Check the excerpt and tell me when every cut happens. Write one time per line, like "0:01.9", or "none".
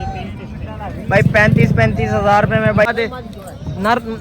0:02.9